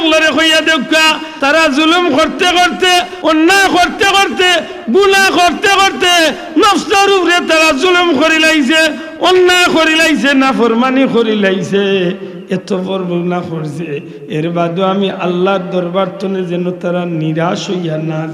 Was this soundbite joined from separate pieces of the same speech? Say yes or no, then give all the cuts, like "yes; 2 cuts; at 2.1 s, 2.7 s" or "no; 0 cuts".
yes; 2 cuts; at 1.3 s, 3.1 s